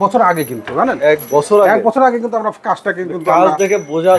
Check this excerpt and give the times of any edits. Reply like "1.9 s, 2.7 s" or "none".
none